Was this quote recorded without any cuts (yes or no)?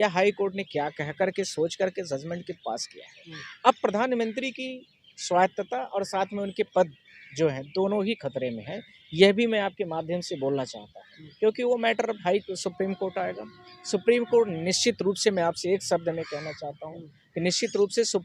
yes